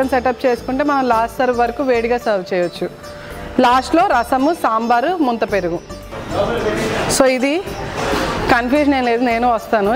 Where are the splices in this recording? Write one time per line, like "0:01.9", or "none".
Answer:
none